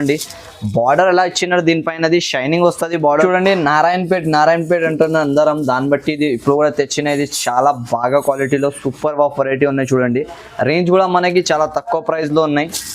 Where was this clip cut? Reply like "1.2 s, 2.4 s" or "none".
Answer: 3.0 s